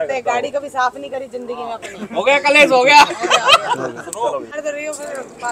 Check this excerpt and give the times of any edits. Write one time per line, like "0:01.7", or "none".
0:04.5